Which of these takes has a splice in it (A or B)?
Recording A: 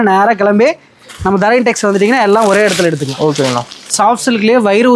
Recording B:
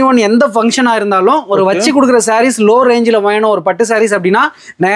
A